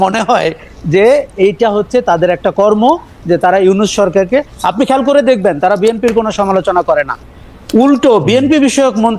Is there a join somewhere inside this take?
no; 0 cuts

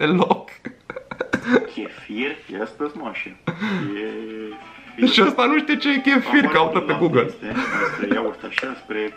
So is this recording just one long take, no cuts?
yes; 0 cuts

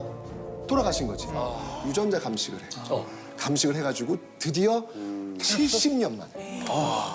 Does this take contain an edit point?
yes; 1 cut; at 1.7 s

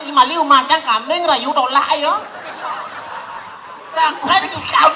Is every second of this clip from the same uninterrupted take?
yes; 0 cuts

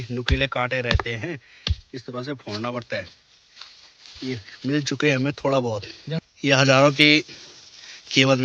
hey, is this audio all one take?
no; 1 cut; at 6.0 s

